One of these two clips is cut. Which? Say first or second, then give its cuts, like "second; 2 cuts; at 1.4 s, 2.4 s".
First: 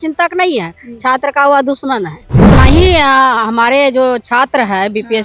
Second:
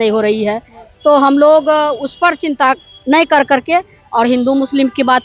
first; 1 cut; at 2.5 s